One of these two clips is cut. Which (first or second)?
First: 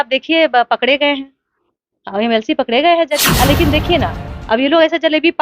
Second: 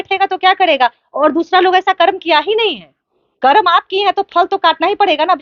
first